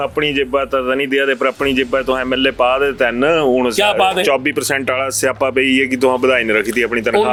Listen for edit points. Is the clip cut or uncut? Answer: uncut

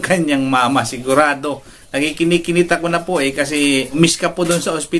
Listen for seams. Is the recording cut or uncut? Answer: cut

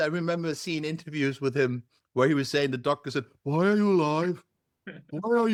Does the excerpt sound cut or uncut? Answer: uncut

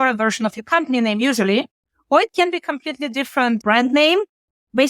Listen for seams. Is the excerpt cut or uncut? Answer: cut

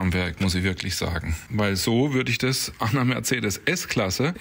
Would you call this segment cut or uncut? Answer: uncut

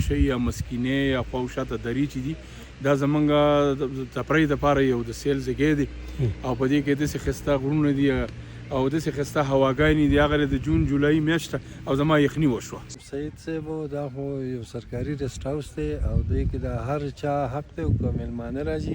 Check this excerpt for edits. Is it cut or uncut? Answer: cut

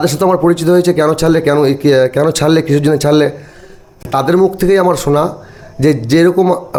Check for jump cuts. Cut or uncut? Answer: uncut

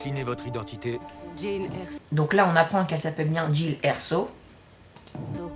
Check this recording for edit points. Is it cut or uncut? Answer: uncut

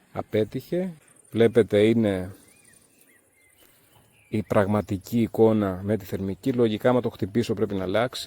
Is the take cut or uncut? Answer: cut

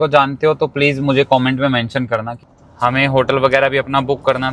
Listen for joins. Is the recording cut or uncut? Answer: cut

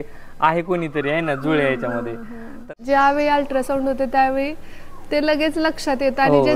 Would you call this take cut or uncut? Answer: cut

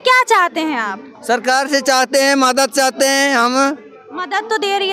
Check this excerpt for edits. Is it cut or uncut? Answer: uncut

